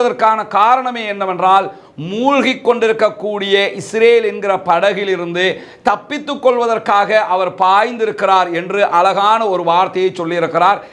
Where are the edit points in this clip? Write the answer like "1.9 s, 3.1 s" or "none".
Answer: none